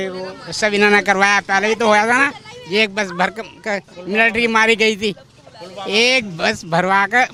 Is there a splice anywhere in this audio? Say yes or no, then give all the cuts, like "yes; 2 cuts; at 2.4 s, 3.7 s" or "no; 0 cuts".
no; 0 cuts